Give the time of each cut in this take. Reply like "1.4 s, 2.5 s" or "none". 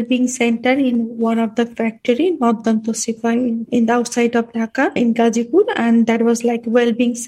3.6 s, 5.0 s